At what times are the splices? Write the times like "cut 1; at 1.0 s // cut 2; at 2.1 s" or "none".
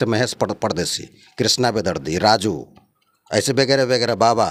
none